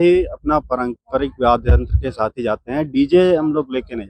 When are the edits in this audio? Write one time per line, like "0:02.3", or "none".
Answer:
none

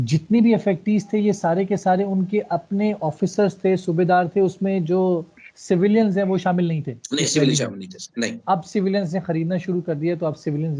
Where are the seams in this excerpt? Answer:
none

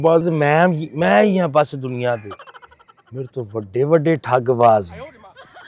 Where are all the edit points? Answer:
none

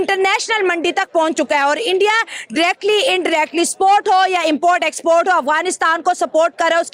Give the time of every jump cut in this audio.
none

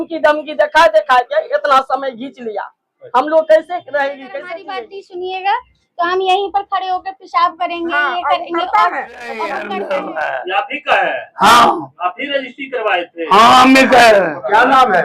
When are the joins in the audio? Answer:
0:04.6
0:09.6

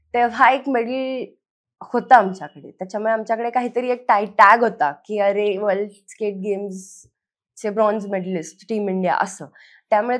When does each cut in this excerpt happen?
none

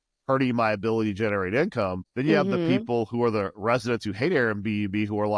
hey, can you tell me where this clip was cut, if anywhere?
0:02.0

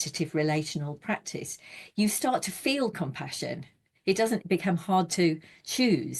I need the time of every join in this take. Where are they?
0:04.4

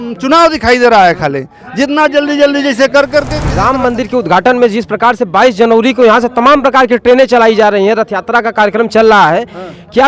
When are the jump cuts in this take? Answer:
0:03.4

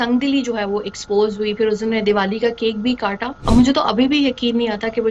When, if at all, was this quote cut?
0:03.3

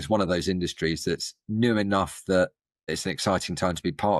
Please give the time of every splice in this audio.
0:02.9

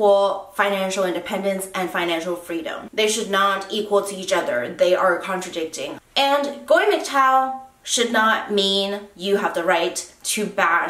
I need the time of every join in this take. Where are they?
none

